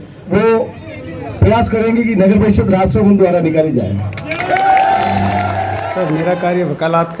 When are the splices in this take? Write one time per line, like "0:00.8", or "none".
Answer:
0:05.8